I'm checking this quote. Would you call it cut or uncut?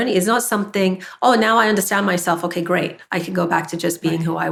uncut